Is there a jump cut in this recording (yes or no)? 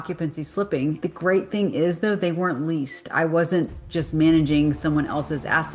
yes